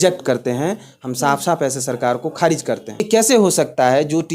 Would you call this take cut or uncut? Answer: cut